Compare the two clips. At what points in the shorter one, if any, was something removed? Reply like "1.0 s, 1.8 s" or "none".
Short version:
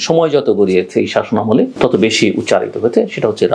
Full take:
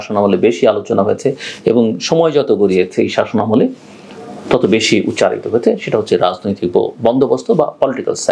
1.7 s

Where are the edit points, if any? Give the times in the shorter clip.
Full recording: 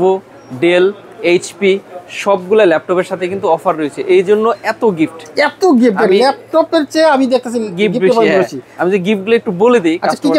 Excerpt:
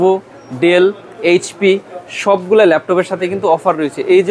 none

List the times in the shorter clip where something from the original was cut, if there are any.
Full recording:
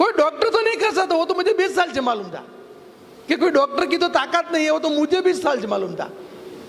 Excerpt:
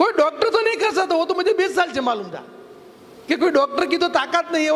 none

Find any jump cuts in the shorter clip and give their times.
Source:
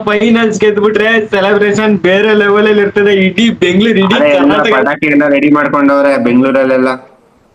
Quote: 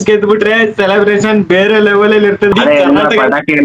2.5 s

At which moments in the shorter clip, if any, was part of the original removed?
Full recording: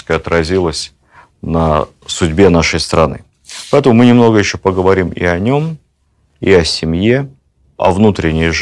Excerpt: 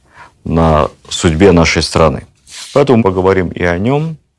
2.8 s

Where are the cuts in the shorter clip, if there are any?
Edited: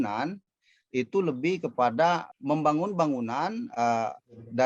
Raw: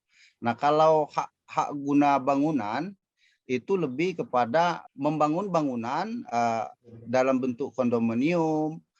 none

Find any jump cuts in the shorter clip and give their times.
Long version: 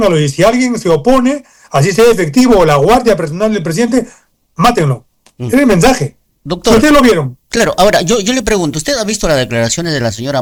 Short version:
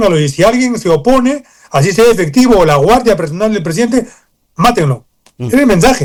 none

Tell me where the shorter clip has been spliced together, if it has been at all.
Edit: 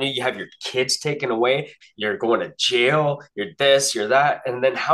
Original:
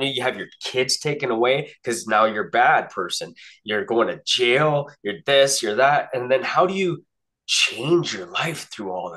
1.8 s

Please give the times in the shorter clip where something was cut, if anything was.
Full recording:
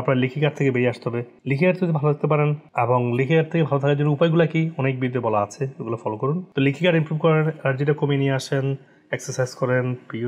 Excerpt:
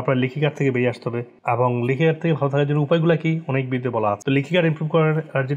1.3 s, 4.2 s

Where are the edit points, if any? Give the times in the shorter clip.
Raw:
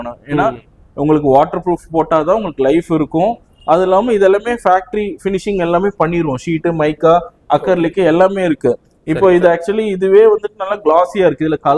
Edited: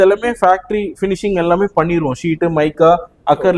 none

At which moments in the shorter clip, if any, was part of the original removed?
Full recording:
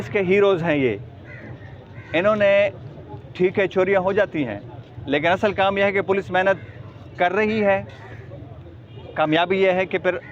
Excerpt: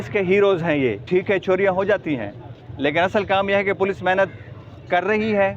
1.0 s

